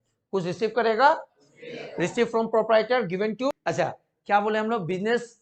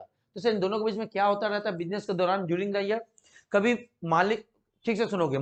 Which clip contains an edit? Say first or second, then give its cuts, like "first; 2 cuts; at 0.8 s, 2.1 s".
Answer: first; 1 cut; at 3.6 s